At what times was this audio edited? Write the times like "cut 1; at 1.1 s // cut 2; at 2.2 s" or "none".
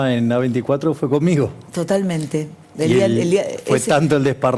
none